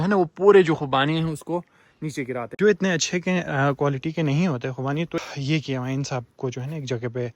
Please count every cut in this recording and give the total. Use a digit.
2